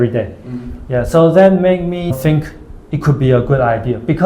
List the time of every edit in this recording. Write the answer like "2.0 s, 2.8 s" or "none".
2.1 s